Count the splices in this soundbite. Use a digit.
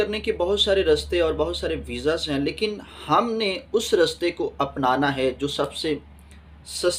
0